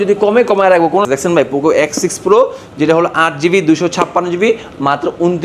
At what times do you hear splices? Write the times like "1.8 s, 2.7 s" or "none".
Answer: 1.1 s